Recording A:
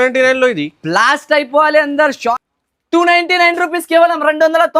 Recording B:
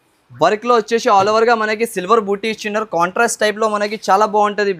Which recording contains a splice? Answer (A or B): A